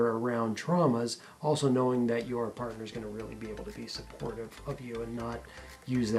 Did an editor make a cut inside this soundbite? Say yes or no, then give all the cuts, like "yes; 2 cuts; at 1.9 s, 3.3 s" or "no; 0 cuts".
no; 0 cuts